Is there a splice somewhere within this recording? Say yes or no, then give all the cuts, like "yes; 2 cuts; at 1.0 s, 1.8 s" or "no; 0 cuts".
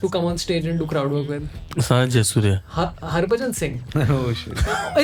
no; 0 cuts